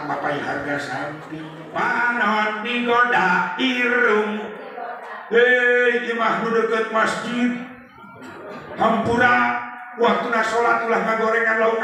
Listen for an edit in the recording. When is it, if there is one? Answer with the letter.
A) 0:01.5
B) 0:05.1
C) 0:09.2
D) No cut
A